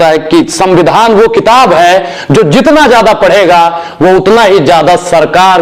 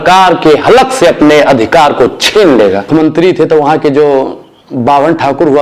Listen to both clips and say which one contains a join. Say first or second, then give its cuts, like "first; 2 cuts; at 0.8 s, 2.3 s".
second; 1 cut; at 2.9 s